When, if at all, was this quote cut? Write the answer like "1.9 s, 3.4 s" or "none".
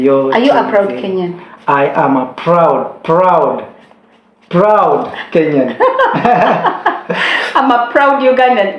7.4 s